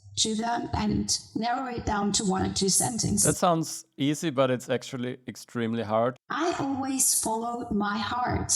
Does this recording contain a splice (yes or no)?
yes